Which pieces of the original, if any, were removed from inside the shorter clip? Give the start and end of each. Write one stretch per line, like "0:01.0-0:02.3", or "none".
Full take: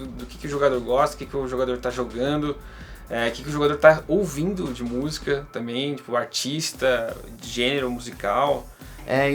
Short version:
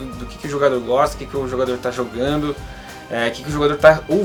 none